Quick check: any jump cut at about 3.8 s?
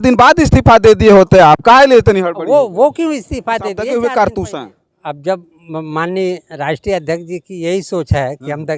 yes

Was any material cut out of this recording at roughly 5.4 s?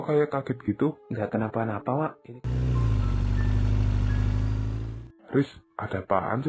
no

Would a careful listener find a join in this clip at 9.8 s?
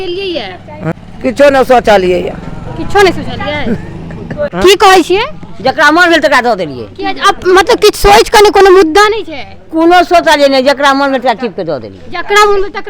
no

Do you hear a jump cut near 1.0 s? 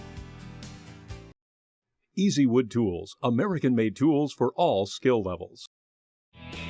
yes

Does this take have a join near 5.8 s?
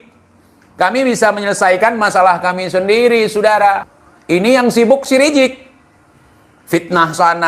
no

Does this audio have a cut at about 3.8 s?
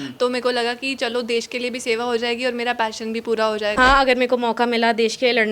yes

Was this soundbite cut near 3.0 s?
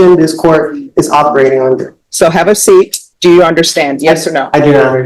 yes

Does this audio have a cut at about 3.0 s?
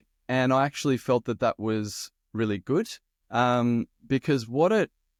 no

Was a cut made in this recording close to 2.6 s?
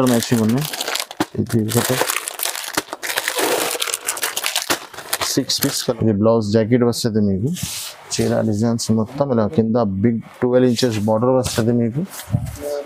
no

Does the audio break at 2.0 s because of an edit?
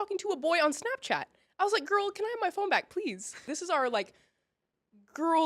no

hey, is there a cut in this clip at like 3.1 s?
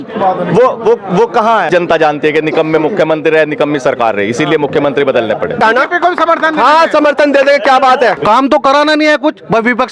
no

